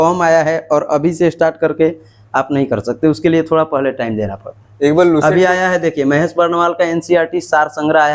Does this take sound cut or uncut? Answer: uncut